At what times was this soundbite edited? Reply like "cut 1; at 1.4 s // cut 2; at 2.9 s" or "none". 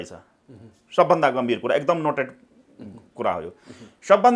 none